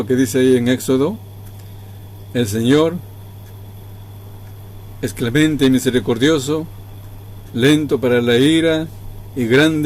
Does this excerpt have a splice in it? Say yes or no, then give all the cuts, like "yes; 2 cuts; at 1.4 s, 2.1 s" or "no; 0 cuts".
no; 0 cuts